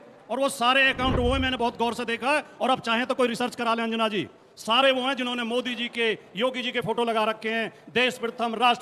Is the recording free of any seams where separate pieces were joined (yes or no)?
yes